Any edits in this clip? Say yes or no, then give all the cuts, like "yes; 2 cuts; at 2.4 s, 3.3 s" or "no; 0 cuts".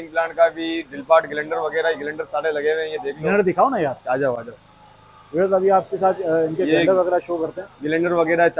no; 0 cuts